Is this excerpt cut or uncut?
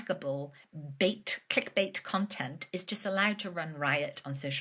uncut